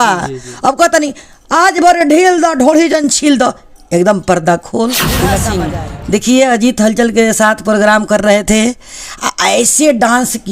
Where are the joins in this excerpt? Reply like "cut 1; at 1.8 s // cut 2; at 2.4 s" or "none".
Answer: cut 1; at 5.4 s